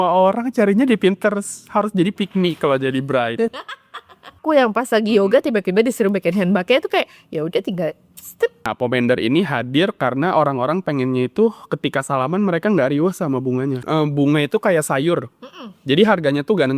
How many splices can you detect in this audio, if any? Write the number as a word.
three